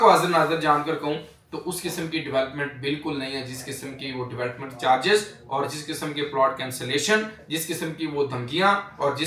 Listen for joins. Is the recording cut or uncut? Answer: uncut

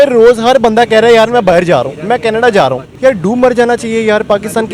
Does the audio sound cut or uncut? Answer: cut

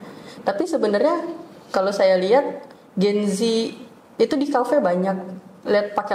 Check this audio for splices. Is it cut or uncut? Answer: uncut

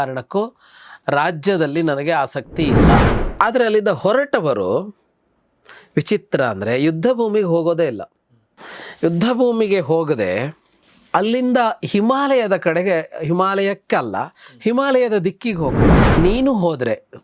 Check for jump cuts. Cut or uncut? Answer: cut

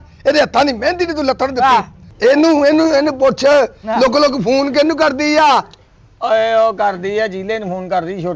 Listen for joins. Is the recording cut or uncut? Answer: cut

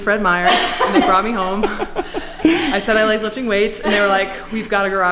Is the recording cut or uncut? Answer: uncut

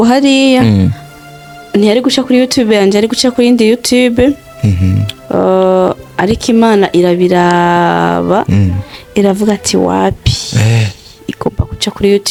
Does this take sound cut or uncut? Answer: uncut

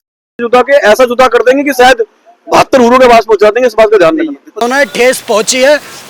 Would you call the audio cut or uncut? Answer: cut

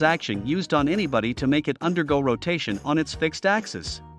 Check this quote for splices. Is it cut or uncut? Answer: uncut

